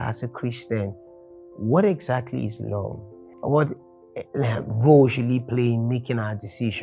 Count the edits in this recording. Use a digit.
0